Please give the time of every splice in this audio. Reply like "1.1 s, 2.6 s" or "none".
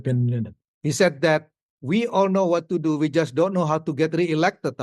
none